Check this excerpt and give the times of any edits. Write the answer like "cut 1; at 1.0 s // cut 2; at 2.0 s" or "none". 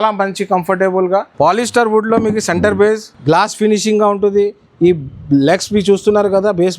cut 1; at 1.3 s // cut 2; at 3.1 s